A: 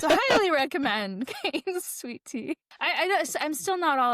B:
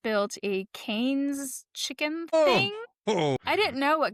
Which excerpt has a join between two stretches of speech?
A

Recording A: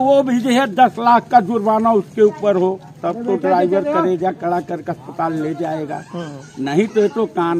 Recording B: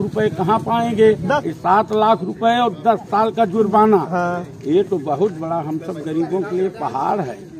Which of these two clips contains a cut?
B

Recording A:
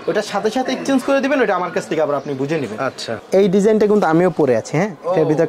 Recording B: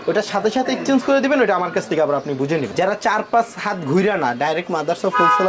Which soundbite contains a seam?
B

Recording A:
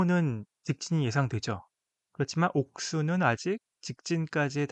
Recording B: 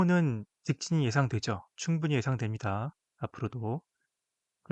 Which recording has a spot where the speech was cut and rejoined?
A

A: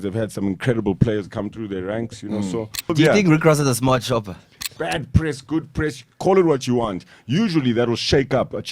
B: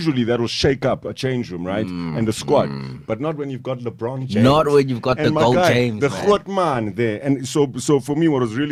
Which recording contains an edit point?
A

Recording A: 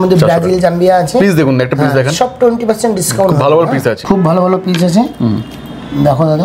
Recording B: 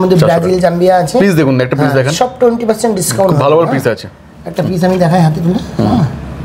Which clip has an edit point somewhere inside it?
A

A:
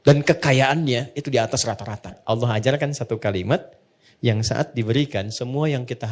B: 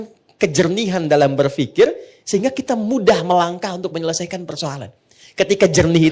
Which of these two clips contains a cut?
A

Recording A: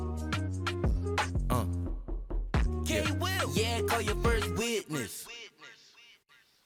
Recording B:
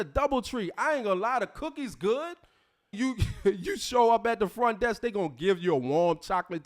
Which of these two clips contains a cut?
B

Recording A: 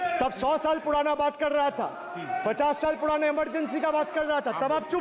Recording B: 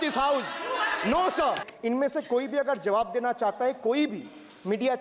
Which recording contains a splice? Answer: B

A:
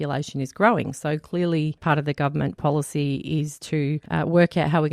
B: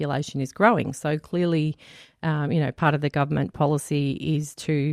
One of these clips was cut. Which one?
A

